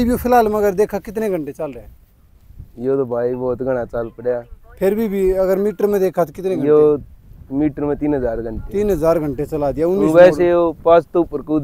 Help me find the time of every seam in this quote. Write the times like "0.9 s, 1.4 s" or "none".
none